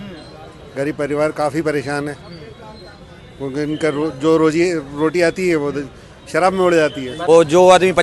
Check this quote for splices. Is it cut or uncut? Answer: cut